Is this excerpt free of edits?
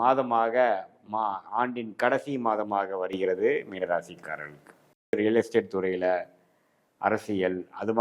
no; 1 cut; at 5.1 s

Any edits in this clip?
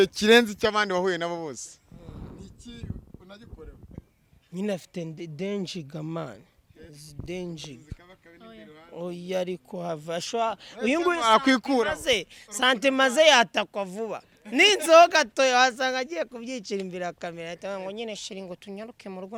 no; 0 cuts

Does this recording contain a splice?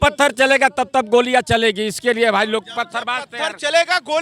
no; 0 cuts

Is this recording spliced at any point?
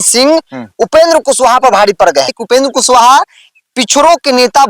yes; 1 cut; at 2.3 s

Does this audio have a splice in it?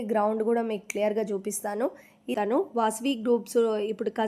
yes; 1 cut; at 2.3 s

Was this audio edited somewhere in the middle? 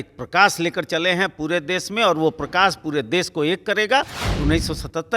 yes; 1 cut; at 4.2 s

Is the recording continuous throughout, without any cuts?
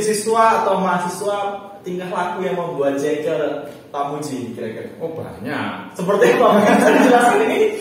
yes; 0 cuts

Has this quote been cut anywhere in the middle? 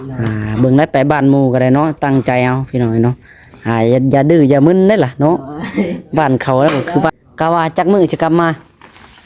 yes; 1 cut; at 7.1 s

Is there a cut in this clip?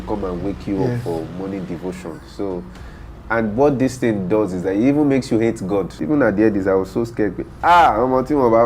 yes; 1 cut; at 6.0 s

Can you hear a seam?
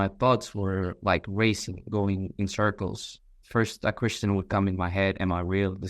yes; 1 cut; at 3.4 s

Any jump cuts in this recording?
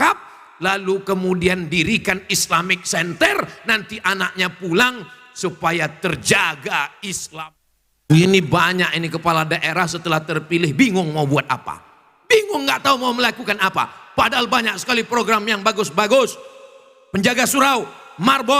yes; 1 cut; at 7.2 s

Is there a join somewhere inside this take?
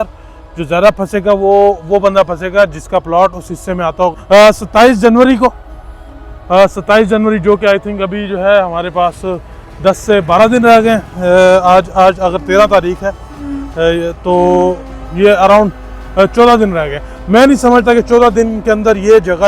yes; 1 cut; at 4.2 s

